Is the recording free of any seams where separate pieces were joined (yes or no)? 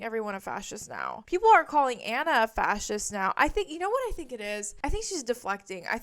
yes